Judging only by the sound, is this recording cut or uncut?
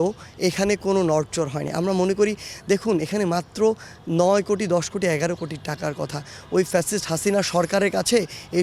uncut